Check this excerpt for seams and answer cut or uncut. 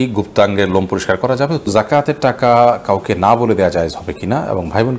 cut